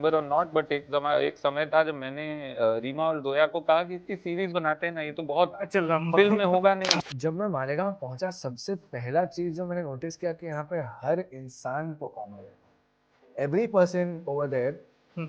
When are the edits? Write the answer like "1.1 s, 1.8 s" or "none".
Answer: 6.9 s